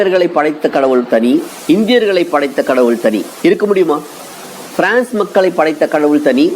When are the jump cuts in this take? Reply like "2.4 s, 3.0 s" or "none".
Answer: 1.5 s, 3.3 s